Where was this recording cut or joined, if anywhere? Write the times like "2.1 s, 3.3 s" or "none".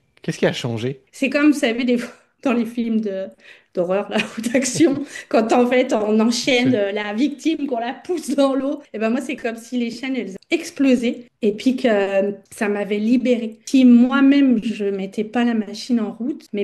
1.1 s, 8.9 s, 13.6 s